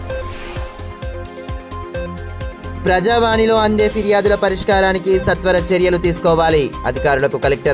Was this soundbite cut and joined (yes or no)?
yes